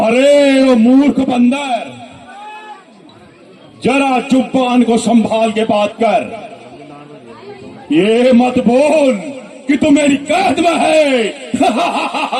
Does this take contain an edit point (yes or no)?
no